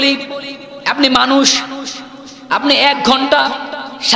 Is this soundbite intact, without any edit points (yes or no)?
yes